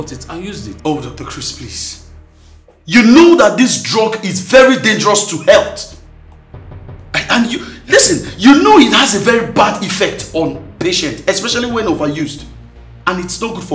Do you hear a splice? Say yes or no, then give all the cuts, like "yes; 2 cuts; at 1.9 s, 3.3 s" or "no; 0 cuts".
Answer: no; 0 cuts